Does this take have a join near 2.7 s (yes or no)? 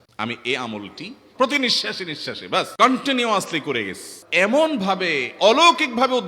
yes